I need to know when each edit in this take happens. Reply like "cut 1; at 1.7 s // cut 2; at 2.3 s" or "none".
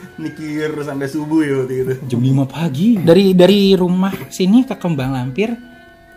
cut 1; at 3.0 s